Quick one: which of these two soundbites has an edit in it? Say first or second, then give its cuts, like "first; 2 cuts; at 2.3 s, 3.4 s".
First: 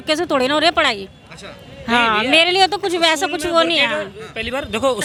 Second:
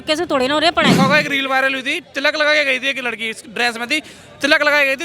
second; 1 cut; at 1.0 s